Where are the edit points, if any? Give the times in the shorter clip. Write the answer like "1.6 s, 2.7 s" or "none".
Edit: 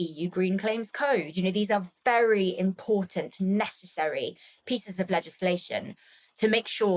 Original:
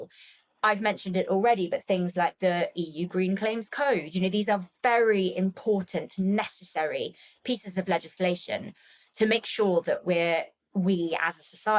none